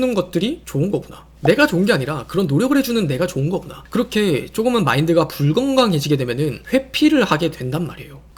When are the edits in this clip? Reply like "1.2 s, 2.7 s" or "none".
none